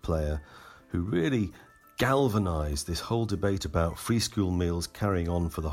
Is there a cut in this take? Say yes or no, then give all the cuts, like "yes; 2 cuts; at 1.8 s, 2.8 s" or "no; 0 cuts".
no; 0 cuts